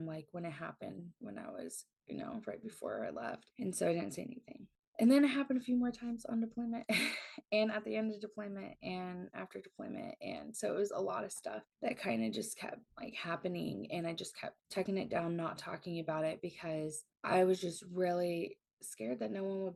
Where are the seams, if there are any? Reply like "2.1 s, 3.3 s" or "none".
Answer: none

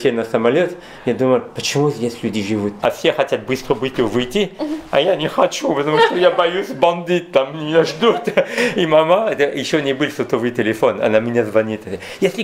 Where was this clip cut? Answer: 2.8 s

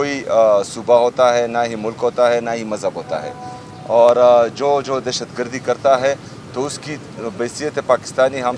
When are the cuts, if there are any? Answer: none

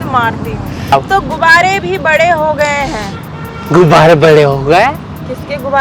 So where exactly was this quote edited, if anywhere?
0.9 s

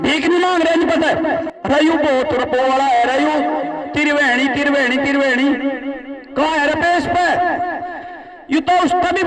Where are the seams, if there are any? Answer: 1.5 s

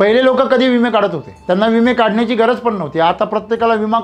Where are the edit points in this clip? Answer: 1.3 s

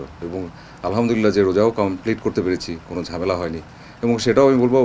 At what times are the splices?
none

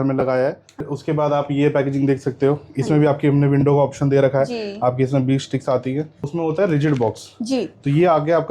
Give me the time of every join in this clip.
0.9 s, 6.3 s

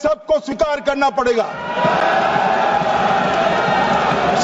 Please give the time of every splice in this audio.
none

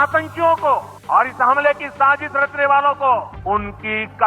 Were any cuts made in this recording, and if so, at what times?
0.9 s, 3.3 s

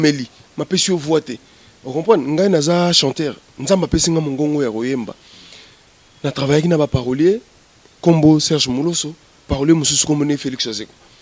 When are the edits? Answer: none

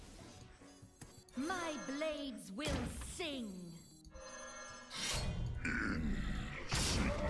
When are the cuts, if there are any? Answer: 1.1 s, 4.0 s, 6.3 s

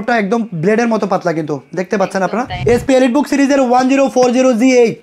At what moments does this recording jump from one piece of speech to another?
2.5 s

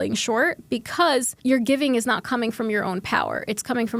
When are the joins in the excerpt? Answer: 1.3 s

